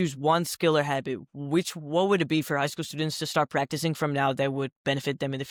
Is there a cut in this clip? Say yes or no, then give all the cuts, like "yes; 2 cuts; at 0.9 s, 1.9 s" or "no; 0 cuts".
no; 0 cuts